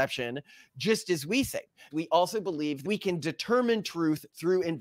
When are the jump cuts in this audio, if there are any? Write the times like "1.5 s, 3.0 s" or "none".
1.8 s, 2.9 s